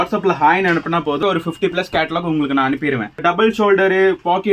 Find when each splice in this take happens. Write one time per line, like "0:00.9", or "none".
0:01.2
0:03.2